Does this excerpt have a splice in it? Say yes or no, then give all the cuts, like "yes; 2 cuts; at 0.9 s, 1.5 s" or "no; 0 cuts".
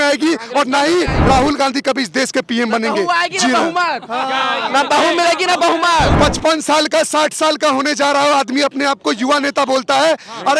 yes; 2 cuts; at 1.1 s, 6.1 s